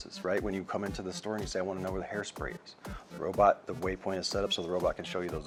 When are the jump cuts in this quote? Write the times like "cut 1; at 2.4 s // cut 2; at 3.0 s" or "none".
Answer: none